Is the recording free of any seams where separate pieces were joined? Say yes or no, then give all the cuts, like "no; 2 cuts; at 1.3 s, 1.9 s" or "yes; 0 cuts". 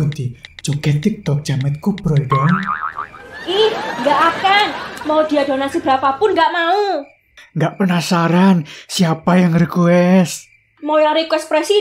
no; 1 cut; at 7.4 s